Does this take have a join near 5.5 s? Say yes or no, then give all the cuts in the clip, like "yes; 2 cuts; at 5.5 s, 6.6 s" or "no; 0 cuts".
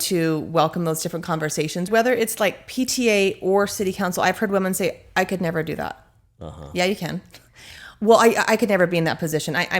no; 1 cut; at 1.9 s